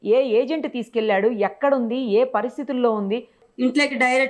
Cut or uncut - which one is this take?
cut